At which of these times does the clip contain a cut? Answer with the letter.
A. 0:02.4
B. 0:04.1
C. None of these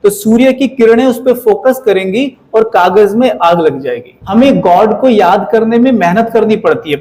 B